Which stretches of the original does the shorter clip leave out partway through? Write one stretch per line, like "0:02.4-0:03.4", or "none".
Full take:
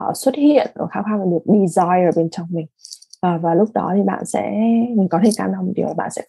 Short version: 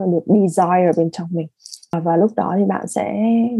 0:03.2-0:03.3